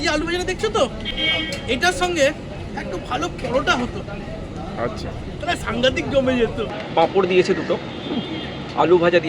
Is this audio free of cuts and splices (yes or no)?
no